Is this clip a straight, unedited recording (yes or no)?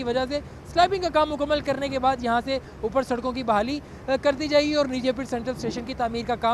yes